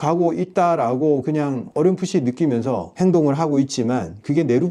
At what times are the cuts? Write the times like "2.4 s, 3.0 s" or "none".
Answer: 1.6 s, 2.9 s